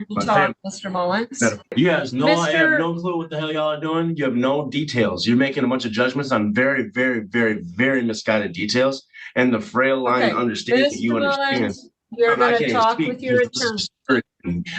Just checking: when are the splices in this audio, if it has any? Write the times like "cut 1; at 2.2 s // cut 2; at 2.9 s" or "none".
cut 1; at 1.7 s